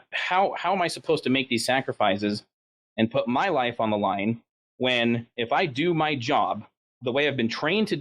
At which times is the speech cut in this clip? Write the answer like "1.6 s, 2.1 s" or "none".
none